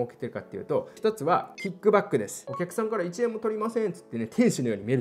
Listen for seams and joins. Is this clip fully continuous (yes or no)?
no